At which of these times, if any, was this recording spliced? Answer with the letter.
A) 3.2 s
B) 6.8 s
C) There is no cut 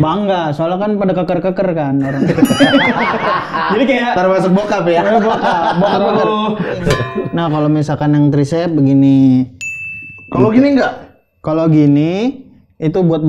B